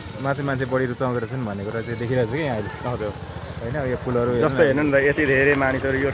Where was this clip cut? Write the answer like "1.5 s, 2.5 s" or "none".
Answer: none